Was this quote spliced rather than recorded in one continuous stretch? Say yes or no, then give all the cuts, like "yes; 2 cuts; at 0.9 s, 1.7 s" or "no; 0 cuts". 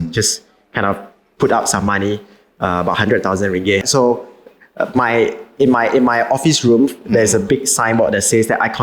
yes; 1 cut; at 3.9 s